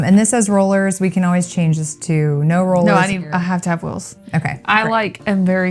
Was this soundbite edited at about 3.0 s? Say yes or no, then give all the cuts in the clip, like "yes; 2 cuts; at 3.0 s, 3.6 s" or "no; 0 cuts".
yes; 1 cut; at 3.0 s